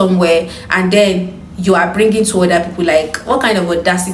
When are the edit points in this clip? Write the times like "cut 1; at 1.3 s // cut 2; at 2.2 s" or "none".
none